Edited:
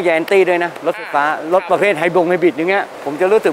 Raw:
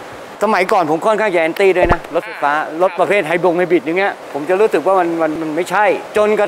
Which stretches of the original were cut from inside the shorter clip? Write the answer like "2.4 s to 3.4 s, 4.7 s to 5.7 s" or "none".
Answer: none